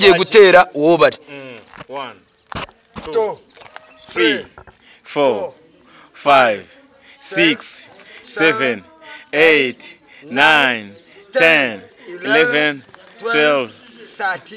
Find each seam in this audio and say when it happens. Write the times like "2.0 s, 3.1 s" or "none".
none